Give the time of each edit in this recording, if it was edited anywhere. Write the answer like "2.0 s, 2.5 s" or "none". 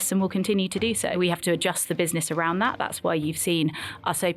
1.2 s